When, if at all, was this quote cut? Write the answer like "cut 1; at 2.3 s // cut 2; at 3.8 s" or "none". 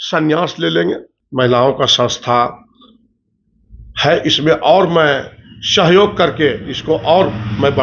cut 1; at 1.2 s